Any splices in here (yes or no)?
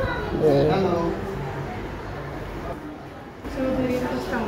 yes